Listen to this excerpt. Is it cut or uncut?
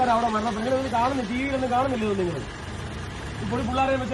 uncut